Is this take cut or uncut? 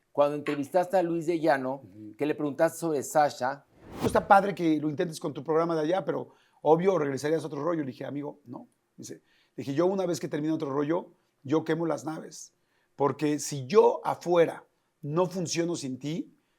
cut